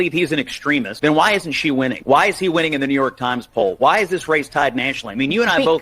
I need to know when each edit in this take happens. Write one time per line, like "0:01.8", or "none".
0:00.9
0:02.0